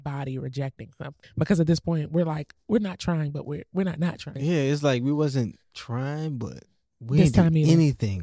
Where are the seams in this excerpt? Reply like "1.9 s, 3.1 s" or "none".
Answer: 1.2 s, 4.3 s